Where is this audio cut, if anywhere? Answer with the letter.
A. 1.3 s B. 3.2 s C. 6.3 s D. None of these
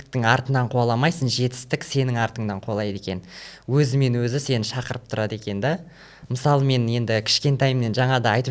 D